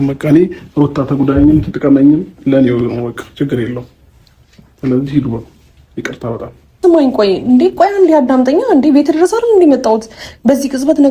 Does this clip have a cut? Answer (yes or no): yes